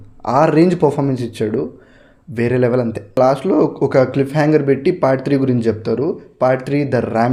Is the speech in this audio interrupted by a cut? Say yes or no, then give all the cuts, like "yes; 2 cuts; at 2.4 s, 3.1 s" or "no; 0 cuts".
no; 0 cuts